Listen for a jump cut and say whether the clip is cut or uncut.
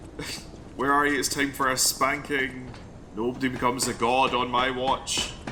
uncut